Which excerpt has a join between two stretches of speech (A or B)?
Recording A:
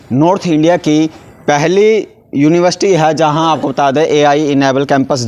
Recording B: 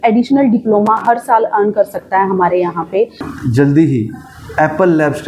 B